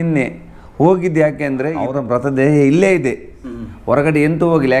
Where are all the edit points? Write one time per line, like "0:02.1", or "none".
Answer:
0:01.9